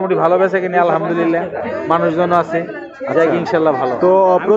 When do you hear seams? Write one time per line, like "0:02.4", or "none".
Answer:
none